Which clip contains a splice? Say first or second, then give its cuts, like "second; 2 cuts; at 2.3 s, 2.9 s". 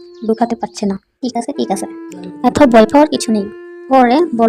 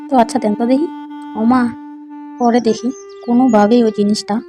first; 1 cut; at 1.2 s